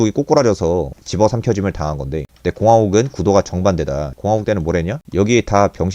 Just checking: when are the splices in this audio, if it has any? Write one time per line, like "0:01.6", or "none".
0:01.0
0:04.1